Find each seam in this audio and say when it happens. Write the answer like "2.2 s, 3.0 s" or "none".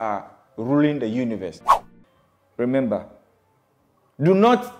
1.9 s